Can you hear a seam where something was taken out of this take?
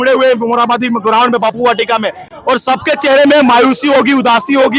no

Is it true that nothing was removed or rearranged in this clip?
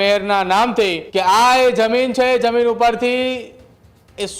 no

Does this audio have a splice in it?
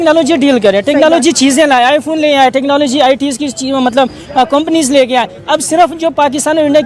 no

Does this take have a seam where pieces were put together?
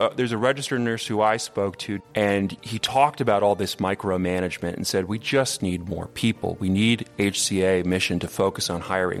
yes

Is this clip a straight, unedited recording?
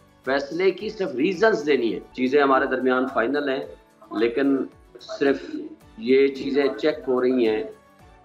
no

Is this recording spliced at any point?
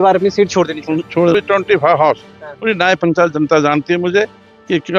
yes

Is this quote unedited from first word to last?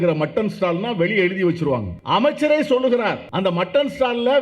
no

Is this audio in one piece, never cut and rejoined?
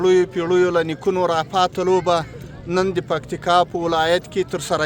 yes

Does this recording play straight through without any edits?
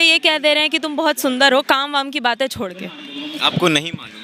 yes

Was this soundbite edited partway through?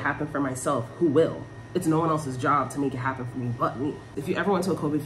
yes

